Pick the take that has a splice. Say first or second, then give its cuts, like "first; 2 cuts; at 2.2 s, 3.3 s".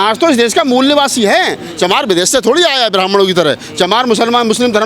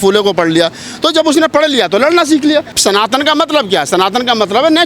second; 1 cut; at 2.7 s